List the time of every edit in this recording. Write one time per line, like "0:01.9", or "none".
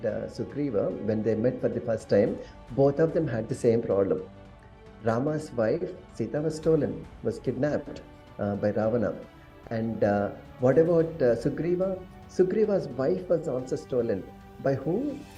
none

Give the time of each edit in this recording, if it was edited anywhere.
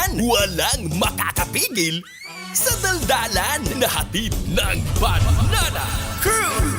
none

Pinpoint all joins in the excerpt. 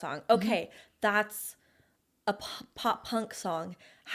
none

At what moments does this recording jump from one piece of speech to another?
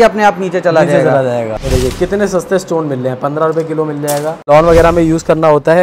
0:01.6
0:04.5

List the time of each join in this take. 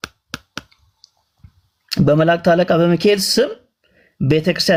none

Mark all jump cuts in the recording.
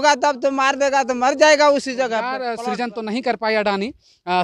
0:02.5

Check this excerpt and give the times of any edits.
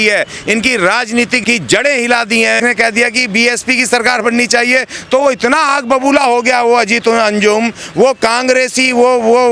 0:01.4
0:02.6

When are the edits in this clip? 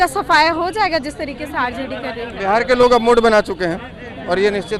none

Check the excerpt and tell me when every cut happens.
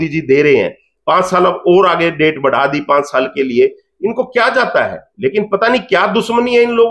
none

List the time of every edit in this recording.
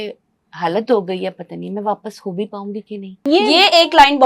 0:03.1

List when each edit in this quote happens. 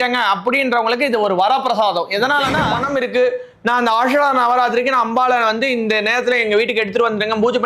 0:02.8

